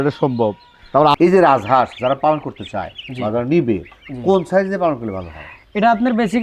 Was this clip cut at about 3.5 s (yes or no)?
no